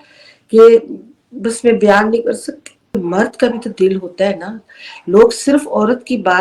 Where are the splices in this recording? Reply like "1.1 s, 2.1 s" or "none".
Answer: 3.0 s